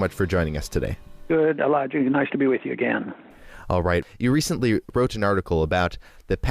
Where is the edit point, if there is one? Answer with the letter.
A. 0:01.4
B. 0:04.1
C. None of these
B